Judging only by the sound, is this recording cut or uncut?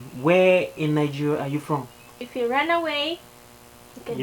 cut